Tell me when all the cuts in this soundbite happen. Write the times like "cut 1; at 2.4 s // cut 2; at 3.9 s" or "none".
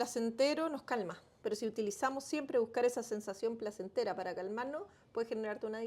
cut 1; at 1.3 s